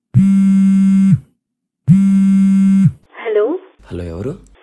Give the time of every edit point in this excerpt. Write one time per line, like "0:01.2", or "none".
0:01.3
0:03.1